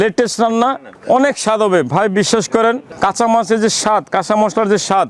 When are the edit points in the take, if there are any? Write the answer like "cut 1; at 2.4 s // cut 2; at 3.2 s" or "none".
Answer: cut 1; at 0.9 s // cut 2; at 2.9 s